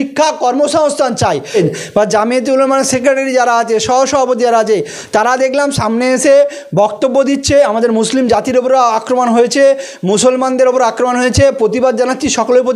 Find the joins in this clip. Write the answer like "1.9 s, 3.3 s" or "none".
1.6 s

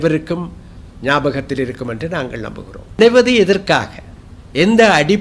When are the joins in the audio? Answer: 3.0 s

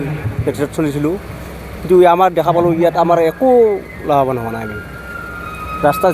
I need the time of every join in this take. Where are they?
none

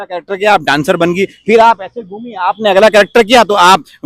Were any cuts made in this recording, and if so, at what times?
none

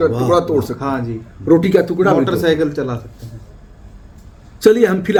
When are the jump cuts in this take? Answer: none

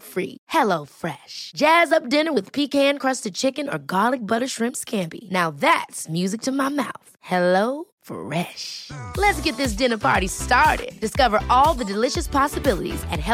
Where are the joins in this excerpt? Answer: none

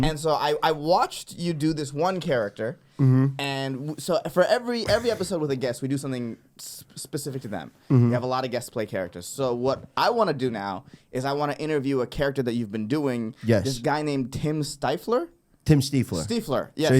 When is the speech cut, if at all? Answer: none

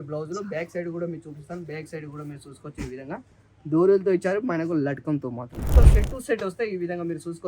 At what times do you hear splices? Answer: 5.7 s

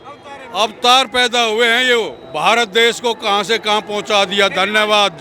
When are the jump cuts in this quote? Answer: none

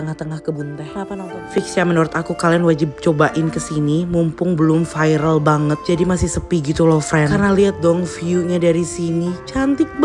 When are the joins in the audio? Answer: 1.6 s

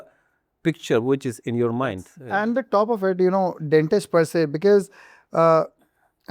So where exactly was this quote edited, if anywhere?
2.1 s

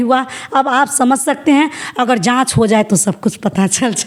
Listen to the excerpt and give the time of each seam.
none

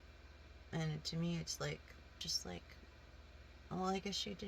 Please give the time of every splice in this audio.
2.2 s

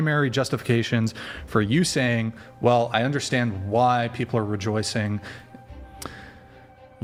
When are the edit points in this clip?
none

